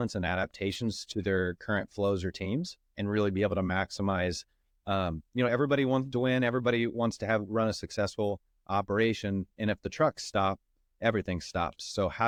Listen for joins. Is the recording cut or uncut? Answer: uncut